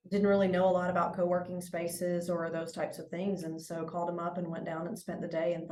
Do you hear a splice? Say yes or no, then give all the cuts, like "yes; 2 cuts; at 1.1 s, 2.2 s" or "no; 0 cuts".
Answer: no; 0 cuts